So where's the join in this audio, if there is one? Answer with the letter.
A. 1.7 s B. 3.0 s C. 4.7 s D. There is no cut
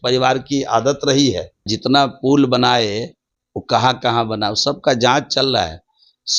A